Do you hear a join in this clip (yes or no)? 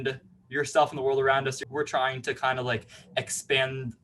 yes